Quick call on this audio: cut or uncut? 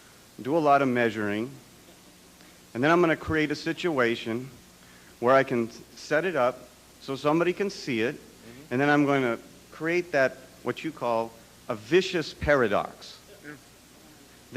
cut